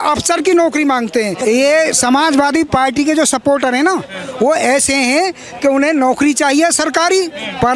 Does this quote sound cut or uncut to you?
cut